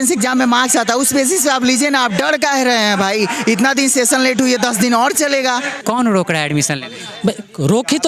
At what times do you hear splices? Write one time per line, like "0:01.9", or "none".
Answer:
0:05.8